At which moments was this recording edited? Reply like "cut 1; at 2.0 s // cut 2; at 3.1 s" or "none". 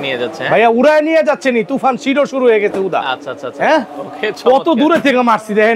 none